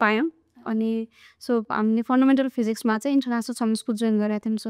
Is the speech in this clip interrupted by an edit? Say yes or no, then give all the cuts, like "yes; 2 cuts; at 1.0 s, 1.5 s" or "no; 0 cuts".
no; 0 cuts